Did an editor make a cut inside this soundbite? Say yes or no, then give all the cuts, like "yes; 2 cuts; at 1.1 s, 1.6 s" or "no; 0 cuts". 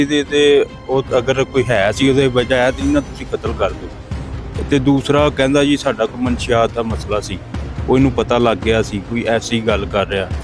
no; 0 cuts